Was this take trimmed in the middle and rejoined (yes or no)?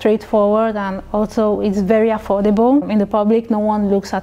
yes